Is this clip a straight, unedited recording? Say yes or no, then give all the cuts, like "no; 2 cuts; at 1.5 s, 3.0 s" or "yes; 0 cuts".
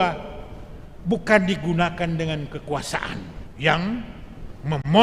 no; 1 cut; at 3.4 s